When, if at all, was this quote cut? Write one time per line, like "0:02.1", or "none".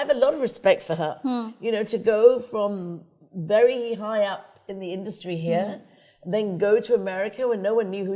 none

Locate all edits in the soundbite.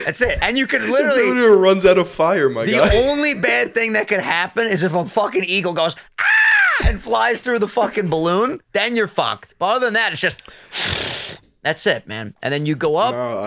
0:09.4

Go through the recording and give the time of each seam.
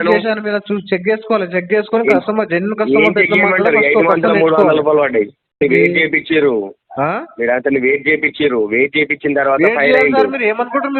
0:05.5

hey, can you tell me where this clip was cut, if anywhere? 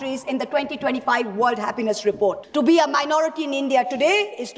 0:02.4

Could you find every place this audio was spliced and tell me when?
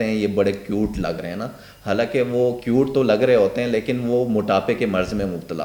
none

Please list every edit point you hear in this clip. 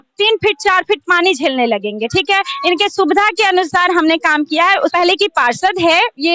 0:04.9

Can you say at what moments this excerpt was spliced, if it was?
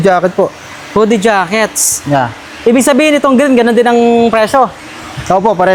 none

